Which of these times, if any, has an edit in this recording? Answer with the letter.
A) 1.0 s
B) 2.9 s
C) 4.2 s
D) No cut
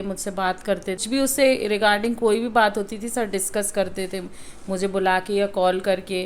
A